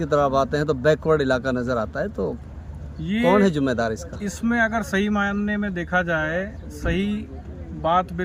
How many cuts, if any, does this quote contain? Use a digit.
0